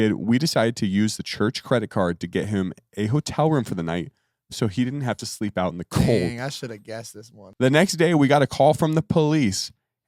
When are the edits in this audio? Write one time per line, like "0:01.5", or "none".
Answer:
none